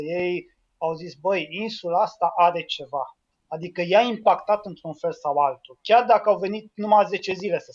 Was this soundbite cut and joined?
no; 0 cuts

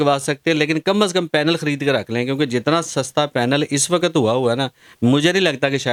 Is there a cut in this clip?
no; 0 cuts

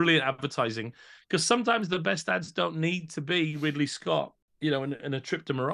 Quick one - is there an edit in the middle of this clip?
yes; 1 cut; at 4.4 s

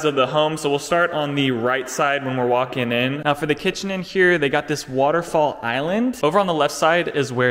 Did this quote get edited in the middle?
yes; 2 cuts; at 3.2 s, 6.2 s

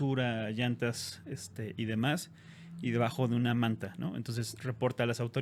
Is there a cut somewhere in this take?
no; 0 cuts

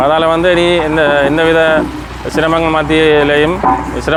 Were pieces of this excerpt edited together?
no; 0 cuts

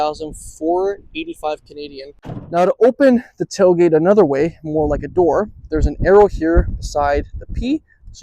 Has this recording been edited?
yes; 1 cut; at 2.4 s

